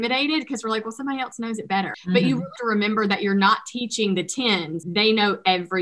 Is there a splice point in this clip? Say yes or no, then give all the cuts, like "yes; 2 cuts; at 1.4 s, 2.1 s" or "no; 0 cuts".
yes; 1 cut; at 4.8 s